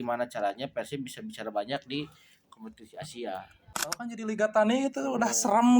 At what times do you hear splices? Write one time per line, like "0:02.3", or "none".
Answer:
0:03.8